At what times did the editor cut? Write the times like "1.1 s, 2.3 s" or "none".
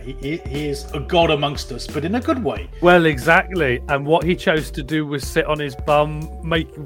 2.7 s